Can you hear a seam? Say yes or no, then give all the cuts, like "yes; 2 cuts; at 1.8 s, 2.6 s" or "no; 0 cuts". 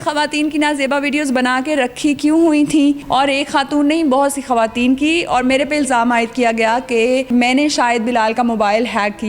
yes; 2 cuts; at 3.0 s, 7.3 s